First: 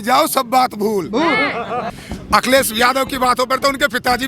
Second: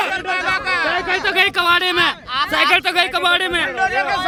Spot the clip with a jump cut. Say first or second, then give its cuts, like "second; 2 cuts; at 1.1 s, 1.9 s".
first; 1 cut; at 2.0 s